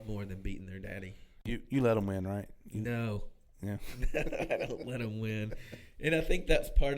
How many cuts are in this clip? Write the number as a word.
one